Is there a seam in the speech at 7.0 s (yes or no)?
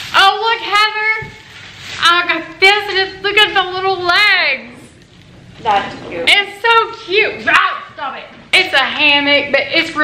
no